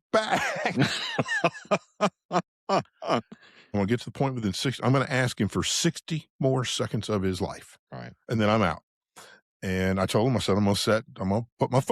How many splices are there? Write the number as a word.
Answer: one